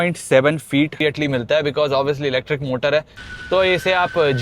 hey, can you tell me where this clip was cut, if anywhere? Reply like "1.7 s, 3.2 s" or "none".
1.0 s, 3.2 s